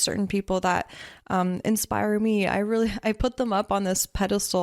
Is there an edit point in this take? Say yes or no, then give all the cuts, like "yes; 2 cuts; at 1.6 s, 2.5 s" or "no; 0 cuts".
no; 0 cuts